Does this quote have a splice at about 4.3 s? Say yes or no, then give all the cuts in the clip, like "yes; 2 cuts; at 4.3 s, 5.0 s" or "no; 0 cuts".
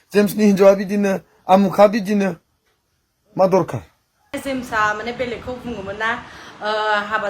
yes; 1 cut; at 4.3 s